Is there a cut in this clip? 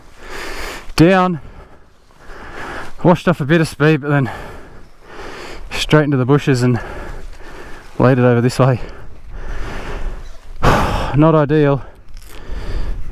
no; 0 cuts

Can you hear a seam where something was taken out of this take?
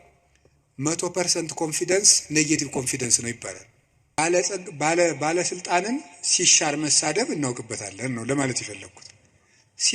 yes; 1 cut; at 4.2 s

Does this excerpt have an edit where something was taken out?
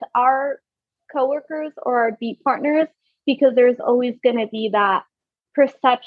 no; 0 cuts

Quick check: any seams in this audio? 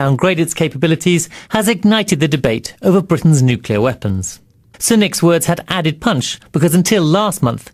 no; 0 cuts

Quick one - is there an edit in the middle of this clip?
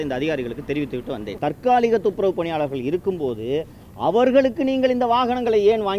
yes; 1 cut; at 1.3 s

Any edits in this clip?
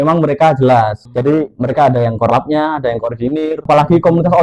yes; 2 cuts; at 1.0 s, 3.7 s

